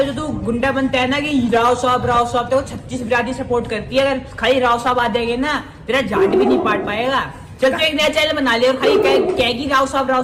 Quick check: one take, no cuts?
yes; 0 cuts

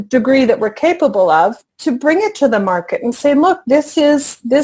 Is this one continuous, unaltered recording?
yes; 0 cuts

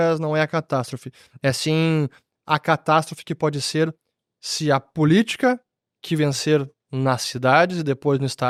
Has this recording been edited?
no; 0 cuts

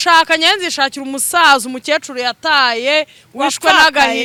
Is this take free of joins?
yes; 0 cuts

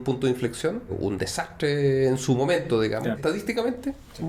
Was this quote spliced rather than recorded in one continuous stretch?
yes; 2 cuts; at 1.0 s, 3.2 s

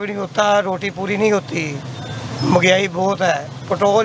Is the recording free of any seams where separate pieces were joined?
yes; 0 cuts

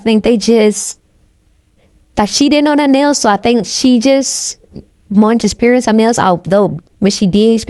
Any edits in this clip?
no; 0 cuts

